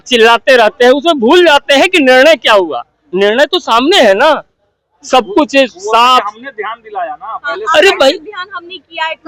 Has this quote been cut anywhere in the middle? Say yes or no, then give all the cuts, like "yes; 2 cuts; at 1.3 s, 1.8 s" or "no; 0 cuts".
no; 0 cuts